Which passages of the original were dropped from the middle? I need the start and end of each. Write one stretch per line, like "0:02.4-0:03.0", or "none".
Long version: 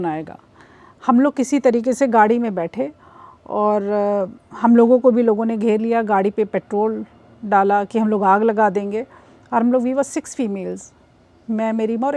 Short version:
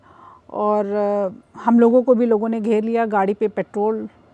none